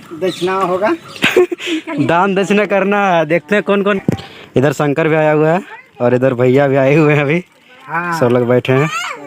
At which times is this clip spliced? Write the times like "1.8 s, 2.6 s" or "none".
4.0 s

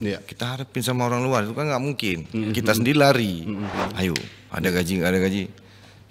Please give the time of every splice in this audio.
3.7 s

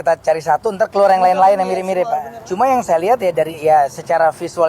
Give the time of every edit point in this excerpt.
2.4 s

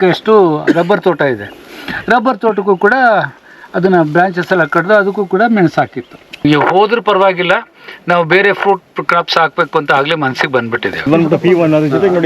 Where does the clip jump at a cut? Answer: 6.4 s, 11.0 s

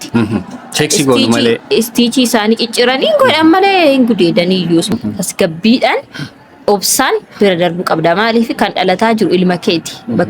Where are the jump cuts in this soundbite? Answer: 4.9 s

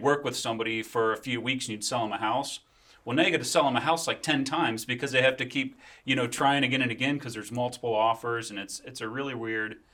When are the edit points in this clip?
none

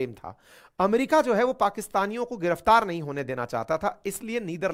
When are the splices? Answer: none

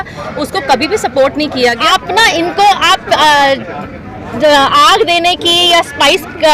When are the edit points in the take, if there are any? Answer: 1.8 s

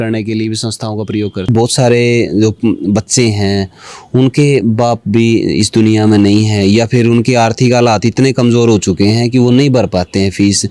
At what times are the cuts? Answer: 1.5 s

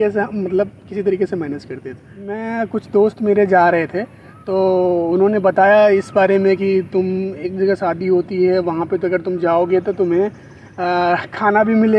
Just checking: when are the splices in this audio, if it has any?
2.4 s

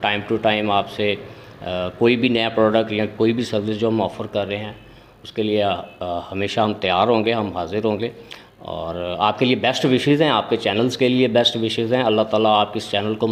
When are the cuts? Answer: none

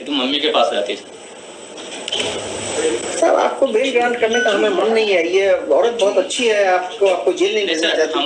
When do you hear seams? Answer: none

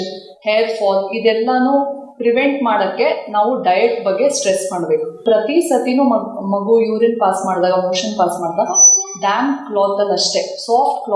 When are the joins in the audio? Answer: 5.2 s

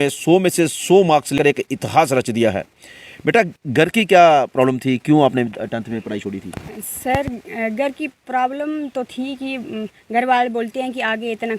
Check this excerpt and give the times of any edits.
1.4 s

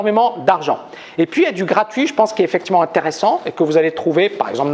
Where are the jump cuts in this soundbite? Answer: 2.5 s

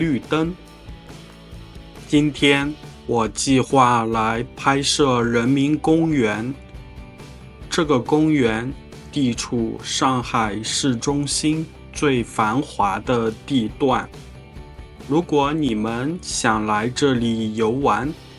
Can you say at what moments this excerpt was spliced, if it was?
2.1 s

